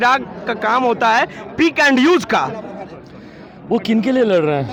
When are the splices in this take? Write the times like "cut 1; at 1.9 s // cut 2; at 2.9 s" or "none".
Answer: none

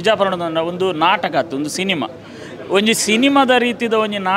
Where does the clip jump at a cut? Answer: none

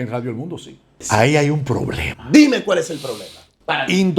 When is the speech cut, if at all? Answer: cut 1; at 1.0 s

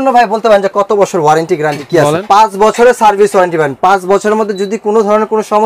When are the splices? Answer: cut 1; at 2.2 s

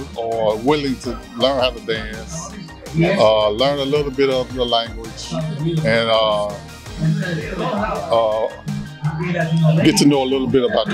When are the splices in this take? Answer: none

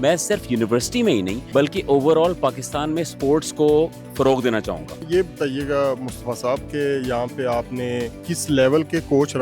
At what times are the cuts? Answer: cut 1; at 1.4 s // cut 2; at 5.0 s // cut 3; at 8.2 s

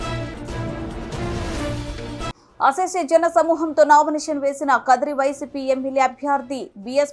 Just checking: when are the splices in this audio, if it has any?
cut 1; at 1.7 s // cut 2; at 2.3 s

